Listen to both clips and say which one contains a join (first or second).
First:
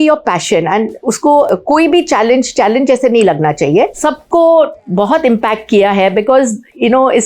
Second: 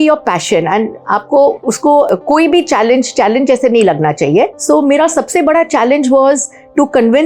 first